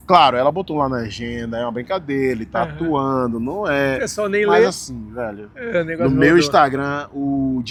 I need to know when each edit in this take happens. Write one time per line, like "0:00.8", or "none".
none